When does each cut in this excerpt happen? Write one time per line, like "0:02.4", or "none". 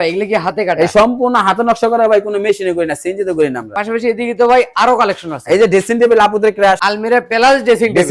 0:03.7
0:06.8